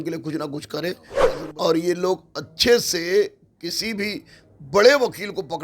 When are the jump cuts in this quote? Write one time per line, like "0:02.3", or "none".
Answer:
0:01.1